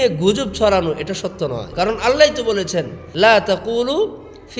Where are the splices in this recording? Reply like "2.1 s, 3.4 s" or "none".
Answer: 1.7 s, 3.0 s